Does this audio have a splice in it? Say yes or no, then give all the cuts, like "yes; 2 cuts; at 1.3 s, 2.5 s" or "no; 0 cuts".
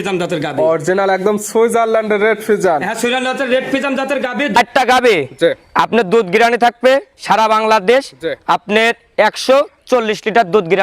yes; 1 cut; at 4.6 s